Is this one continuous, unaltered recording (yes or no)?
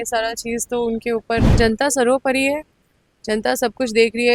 no